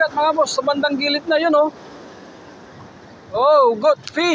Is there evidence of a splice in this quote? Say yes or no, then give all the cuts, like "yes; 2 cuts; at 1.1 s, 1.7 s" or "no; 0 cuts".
no; 0 cuts